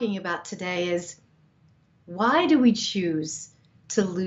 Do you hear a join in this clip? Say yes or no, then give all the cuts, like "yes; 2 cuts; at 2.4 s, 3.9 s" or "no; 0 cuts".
no; 0 cuts